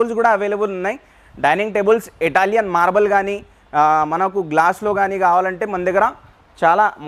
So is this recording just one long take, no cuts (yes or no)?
yes